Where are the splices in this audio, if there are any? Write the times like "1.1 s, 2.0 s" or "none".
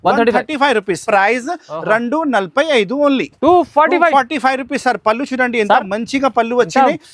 1.0 s